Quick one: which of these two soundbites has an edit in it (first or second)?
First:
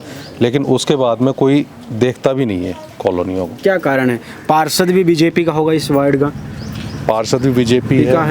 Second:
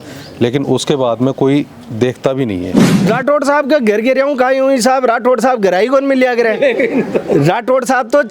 second